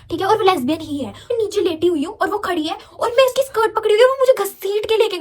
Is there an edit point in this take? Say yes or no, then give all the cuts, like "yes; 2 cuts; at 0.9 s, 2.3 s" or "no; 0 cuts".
yes; 1 cut; at 1.3 s